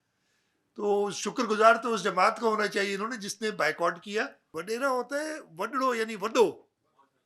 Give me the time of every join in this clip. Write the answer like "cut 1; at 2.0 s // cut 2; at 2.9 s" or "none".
cut 1; at 4.4 s